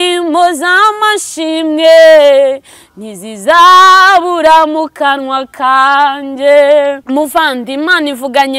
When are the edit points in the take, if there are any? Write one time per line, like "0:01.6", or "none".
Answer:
0:07.0